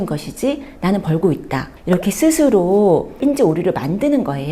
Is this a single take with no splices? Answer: yes; 0 cuts

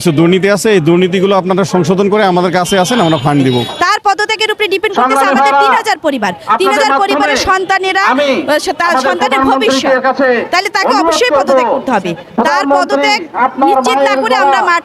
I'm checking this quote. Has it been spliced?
yes; 1 cut; at 3.7 s

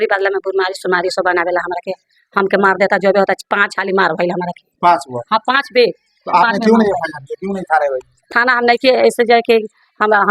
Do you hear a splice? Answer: no; 0 cuts

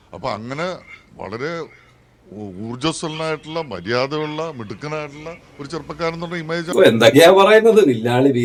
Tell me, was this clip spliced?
no; 0 cuts

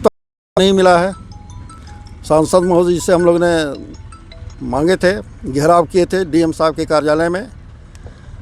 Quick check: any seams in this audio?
no; 0 cuts

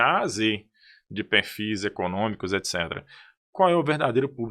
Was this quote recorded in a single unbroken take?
yes; 0 cuts

